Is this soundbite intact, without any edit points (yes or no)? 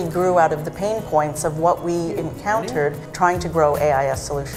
yes